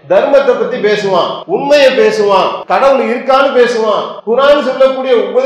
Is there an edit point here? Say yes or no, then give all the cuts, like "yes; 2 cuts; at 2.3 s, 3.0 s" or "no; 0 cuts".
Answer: yes; 3 cuts; at 1.4 s, 2.6 s, 4.1 s